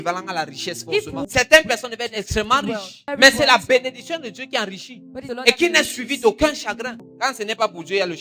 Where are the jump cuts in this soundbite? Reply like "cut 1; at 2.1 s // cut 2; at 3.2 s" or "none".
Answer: cut 1; at 1.2 s // cut 2; at 3.1 s // cut 3; at 5.2 s // cut 4; at 7.0 s

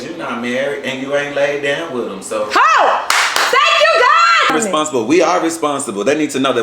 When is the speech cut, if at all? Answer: cut 1; at 4.4 s

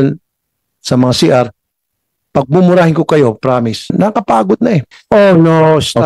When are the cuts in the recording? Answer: cut 1; at 3.9 s // cut 2; at 4.9 s

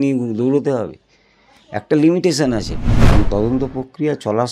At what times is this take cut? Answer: cut 1; at 3.0 s

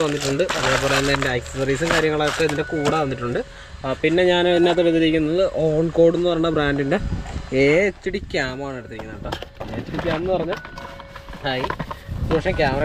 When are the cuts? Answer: none

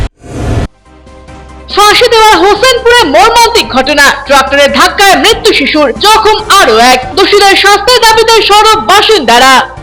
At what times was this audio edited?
none

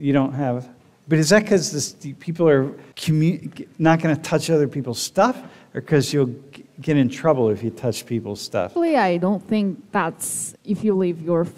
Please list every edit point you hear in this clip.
cut 1; at 2.9 s // cut 2; at 8.7 s

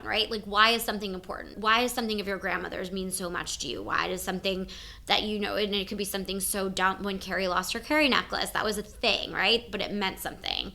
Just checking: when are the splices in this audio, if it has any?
cut 1; at 1.5 s

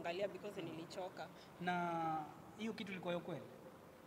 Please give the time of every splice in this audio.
none

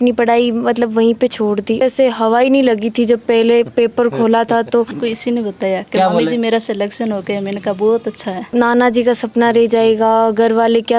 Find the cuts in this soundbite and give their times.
cut 1; at 1.8 s // cut 2; at 4.9 s // cut 3; at 8.4 s

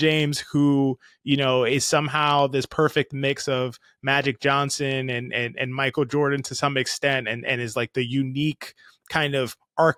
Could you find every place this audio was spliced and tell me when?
none

